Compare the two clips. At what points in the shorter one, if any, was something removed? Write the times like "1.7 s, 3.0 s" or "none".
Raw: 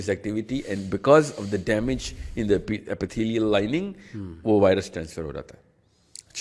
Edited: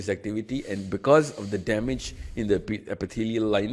none